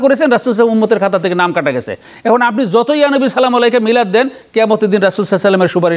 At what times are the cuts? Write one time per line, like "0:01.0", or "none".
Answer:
none